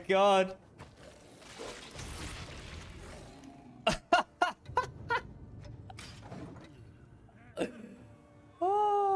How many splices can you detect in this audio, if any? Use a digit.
0